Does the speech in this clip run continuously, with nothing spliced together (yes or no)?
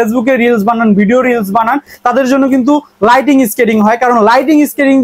yes